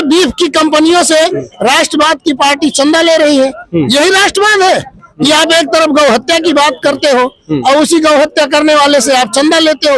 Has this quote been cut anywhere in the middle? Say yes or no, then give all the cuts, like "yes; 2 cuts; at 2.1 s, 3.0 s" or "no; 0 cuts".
no; 0 cuts